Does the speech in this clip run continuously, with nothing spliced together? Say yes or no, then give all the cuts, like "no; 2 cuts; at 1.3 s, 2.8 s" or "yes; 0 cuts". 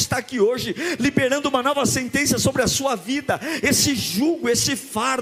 yes; 0 cuts